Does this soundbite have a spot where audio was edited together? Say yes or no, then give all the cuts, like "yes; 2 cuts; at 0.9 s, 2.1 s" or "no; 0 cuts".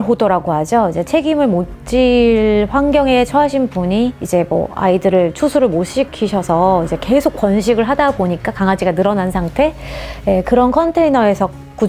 no; 0 cuts